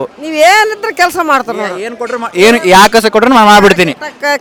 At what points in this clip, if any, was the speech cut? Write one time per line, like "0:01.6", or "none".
none